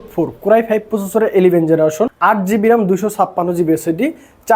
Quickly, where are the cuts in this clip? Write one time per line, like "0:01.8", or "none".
0:02.1